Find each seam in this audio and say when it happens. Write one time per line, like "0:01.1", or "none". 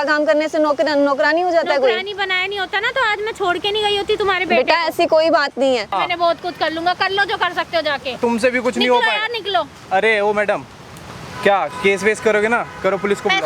0:05.9